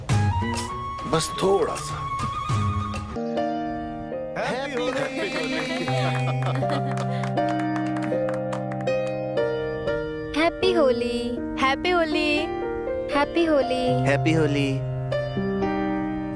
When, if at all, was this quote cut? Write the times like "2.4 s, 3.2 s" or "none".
3.2 s